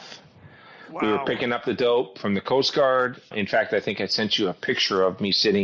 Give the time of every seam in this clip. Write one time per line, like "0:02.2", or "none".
0:03.3